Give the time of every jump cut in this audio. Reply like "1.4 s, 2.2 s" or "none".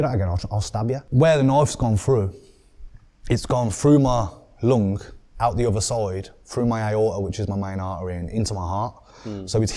1.0 s